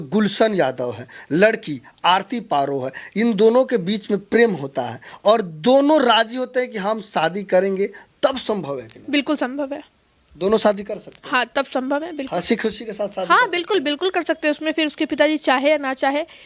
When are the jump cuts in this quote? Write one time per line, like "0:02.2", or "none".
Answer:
none